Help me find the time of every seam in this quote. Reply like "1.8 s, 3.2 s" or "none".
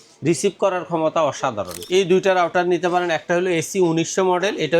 1.8 s